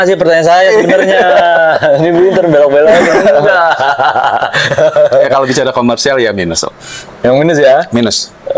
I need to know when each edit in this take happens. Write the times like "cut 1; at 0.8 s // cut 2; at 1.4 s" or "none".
none